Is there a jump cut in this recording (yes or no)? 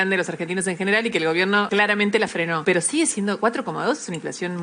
yes